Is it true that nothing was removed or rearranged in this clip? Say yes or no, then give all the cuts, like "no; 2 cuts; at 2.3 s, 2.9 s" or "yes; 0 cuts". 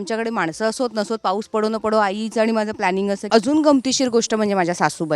no; 1 cut; at 3.2 s